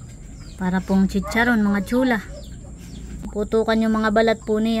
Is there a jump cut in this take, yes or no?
yes